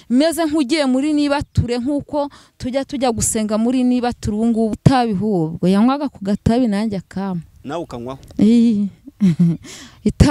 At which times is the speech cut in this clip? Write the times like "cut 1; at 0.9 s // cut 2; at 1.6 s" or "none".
cut 1; at 4.7 s